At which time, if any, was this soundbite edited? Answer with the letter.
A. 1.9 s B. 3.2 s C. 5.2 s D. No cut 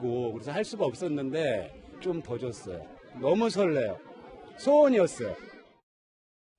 D